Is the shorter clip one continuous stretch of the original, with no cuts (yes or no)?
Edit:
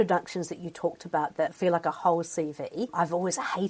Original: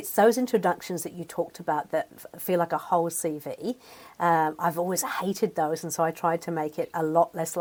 no